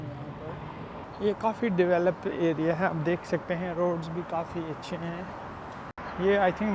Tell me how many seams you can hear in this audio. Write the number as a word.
two